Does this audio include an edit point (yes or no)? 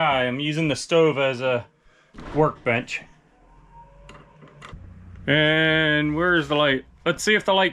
yes